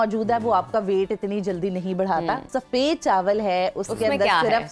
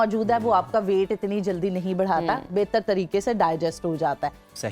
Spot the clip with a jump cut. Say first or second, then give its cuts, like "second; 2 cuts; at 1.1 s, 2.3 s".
first; 1 cut; at 2.5 s